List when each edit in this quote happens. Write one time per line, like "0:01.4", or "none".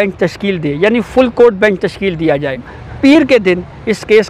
0:02.8